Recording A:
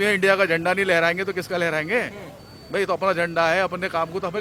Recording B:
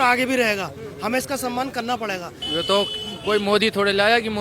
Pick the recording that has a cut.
B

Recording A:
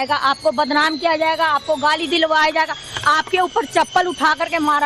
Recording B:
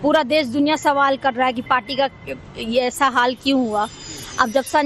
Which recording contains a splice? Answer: B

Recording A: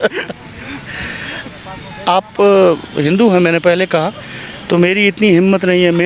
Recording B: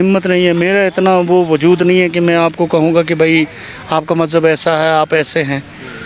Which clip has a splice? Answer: A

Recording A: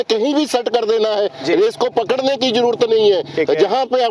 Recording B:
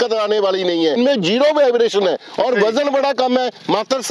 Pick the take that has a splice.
B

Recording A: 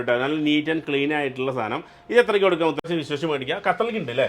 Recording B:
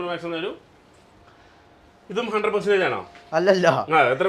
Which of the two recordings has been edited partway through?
A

